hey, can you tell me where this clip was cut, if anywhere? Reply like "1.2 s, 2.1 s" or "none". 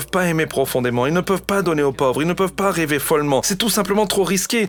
none